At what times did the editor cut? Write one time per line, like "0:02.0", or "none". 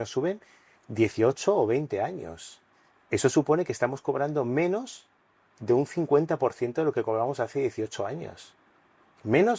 none